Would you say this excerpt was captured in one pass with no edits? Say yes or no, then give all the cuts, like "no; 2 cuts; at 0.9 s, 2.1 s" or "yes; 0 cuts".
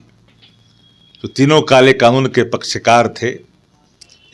yes; 0 cuts